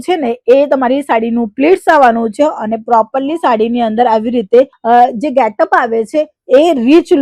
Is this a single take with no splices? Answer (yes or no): yes